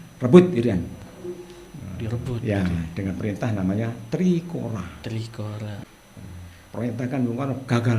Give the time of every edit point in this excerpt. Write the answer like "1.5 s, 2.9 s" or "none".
5.8 s